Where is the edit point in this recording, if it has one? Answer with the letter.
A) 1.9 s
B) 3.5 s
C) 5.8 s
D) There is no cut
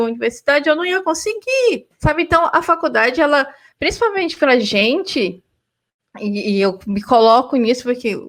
D